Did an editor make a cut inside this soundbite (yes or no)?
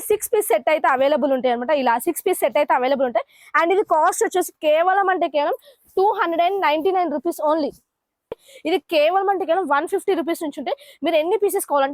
yes